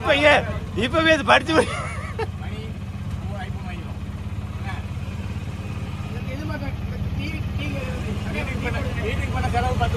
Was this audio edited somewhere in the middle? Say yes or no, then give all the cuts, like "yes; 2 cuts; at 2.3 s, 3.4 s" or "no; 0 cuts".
no; 0 cuts